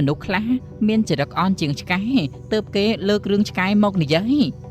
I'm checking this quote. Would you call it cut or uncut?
uncut